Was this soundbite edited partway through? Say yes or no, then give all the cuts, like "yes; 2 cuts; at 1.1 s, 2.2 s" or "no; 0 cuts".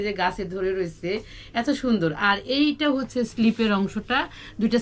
no; 0 cuts